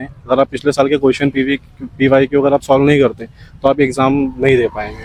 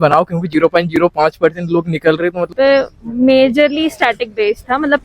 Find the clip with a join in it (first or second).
second